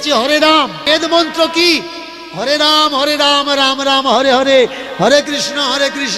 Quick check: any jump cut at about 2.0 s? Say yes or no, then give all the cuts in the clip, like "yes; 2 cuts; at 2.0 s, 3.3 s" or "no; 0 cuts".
no; 0 cuts